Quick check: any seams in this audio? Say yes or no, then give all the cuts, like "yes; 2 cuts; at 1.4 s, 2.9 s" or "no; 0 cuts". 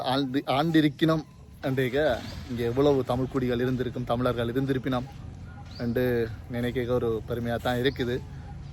no; 0 cuts